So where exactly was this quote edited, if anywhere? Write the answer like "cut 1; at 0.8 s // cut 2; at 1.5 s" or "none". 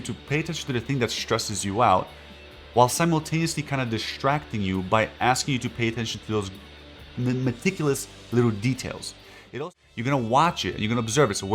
cut 1; at 9.3 s